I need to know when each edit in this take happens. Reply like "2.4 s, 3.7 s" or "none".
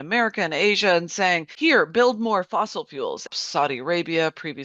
1.5 s, 3.3 s